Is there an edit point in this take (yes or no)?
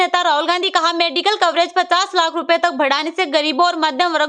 no